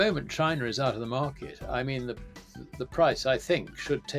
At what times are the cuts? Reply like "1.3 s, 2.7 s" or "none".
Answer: none